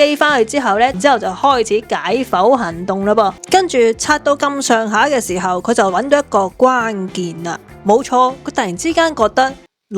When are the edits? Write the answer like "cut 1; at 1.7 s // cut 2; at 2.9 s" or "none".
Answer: cut 1; at 0.9 s // cut 2; at 3.4 s